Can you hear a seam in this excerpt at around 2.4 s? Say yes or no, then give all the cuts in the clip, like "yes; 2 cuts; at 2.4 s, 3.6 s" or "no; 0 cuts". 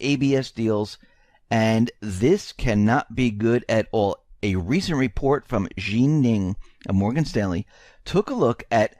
yes; 1 cut; at 2.4 s